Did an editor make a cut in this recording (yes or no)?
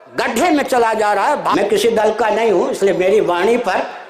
yes